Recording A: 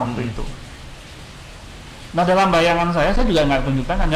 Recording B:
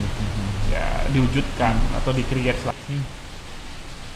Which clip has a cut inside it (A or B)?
B